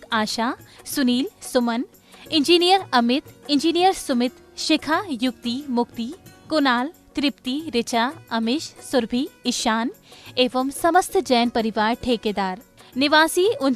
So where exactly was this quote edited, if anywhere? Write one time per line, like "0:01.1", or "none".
none